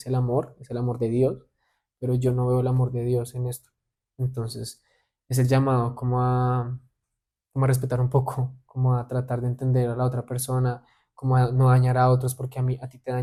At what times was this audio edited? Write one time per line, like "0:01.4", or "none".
none